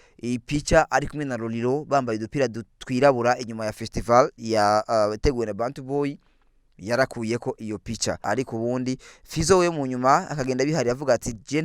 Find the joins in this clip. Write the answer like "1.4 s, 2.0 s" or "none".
8.2 s

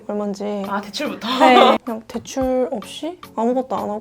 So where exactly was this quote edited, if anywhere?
1.8 s

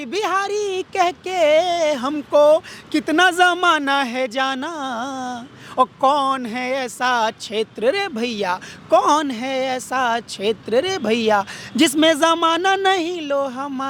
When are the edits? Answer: none

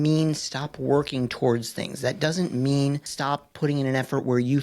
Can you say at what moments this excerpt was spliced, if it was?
3.1 s

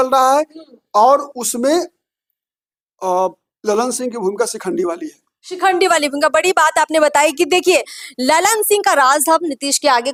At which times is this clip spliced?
none

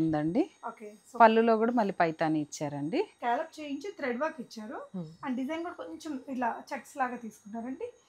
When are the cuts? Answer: 3.1 s

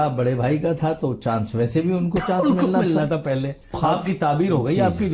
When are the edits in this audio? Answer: 3.8 s

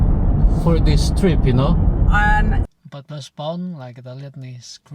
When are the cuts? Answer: 2.7 s

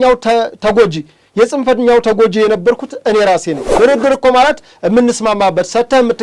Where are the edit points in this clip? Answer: 3.7 s

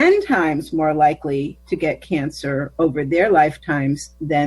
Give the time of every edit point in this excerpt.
1.6 s

